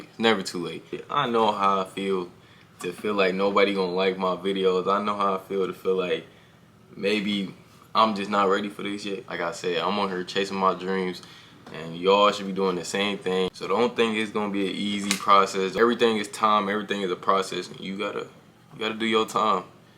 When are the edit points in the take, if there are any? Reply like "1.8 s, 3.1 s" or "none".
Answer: 1.0 s, 9.3 s, 13.6 s, 15.7 s